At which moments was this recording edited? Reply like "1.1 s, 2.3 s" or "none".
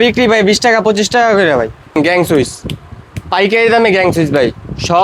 none